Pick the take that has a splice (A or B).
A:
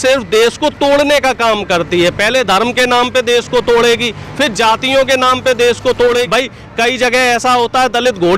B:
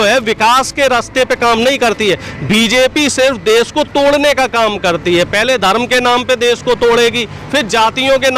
A